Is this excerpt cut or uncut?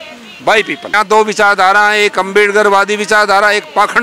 cut